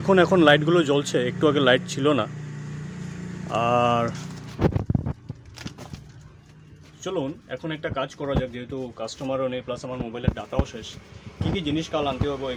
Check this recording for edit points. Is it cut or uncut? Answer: uncut